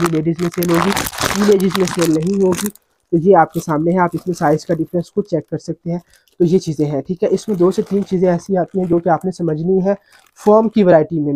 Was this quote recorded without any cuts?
yes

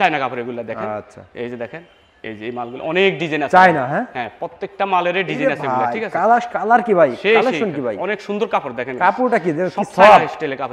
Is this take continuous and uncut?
yes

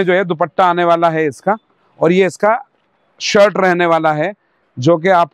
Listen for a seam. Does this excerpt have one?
no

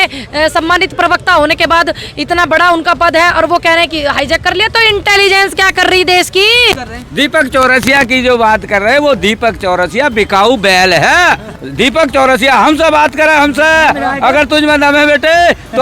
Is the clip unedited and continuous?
no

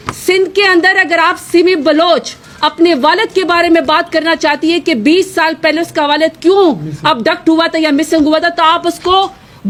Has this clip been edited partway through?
no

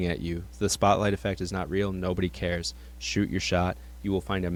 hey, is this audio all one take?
yes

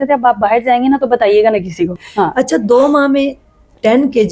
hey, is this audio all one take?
no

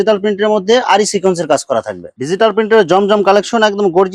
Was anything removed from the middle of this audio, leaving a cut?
yes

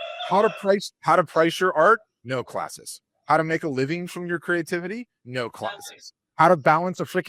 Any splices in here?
no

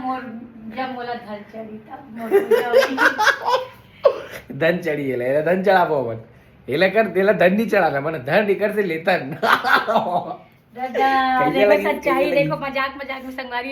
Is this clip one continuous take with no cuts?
yes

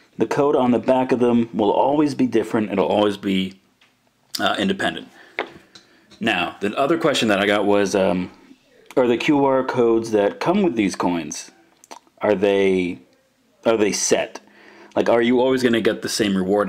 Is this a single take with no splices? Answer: yes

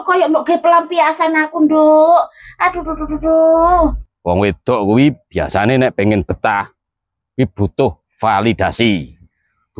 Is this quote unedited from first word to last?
no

